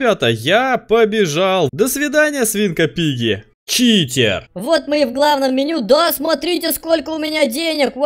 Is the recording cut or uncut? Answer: cut